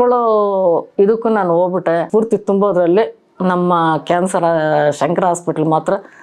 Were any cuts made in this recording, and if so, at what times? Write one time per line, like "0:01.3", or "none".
0:02.1

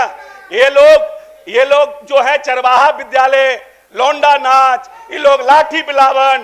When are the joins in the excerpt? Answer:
none

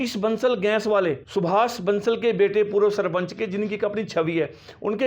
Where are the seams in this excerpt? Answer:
0:01.2

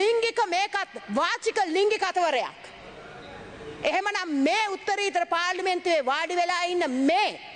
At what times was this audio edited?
none

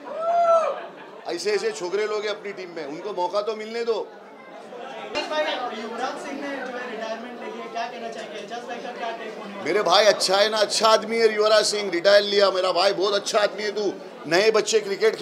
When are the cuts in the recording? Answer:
0:05.1

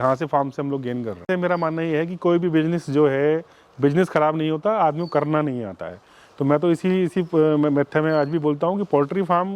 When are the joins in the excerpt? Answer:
0:01.2

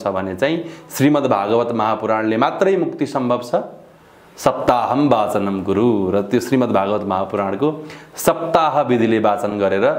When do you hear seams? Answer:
none

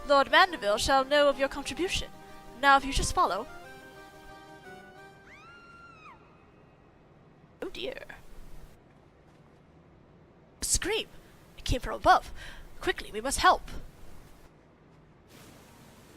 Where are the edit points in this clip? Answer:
0:01.0

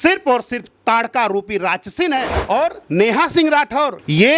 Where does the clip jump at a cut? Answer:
0:02.3

